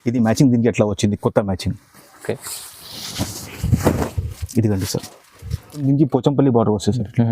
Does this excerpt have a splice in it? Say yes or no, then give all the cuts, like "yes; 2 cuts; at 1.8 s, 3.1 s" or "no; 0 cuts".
yes; 1 cut; at 5.8 s